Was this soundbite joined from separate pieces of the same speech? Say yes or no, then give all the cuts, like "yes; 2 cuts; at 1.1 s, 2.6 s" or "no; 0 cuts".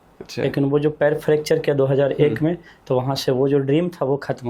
no; 0 cuts